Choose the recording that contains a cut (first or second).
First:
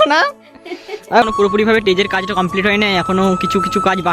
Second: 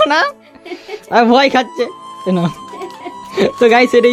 first